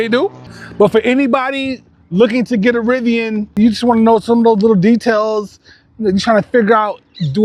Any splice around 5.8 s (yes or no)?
no